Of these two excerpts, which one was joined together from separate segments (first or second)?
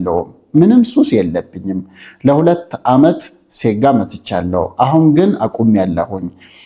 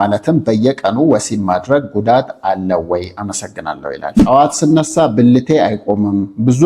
second